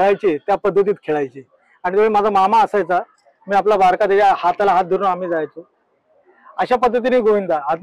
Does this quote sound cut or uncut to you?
uncut